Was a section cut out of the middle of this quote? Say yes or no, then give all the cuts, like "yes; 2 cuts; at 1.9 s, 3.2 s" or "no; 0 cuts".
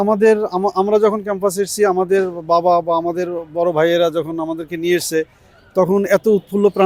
no; 0 cuts